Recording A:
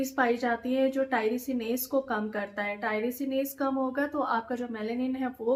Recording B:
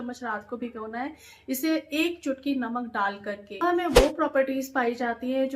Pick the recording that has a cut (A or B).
B